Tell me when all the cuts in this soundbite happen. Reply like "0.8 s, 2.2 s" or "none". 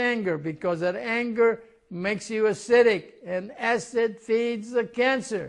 none